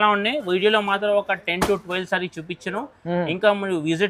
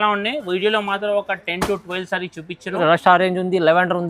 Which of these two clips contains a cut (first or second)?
second